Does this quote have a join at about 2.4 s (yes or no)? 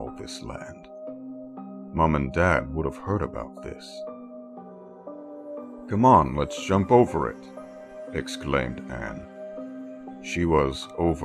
yes